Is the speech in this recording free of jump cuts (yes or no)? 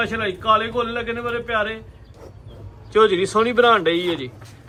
yes